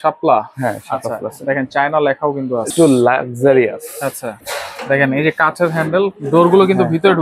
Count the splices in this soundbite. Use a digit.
2